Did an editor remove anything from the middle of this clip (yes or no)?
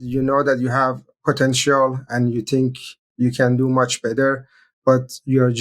yes